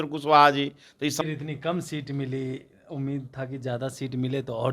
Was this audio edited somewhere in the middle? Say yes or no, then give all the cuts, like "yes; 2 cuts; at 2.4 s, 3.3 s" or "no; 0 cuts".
yes; 1 cut; at 1.2 s